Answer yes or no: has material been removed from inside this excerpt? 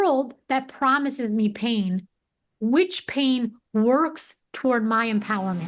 no